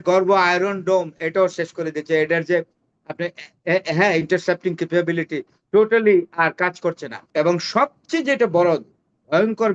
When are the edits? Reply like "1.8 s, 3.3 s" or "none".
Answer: 7.2 s